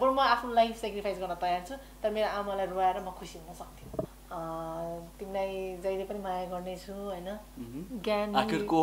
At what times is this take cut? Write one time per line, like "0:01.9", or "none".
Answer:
0:04.2